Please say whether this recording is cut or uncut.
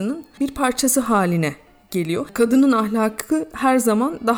cut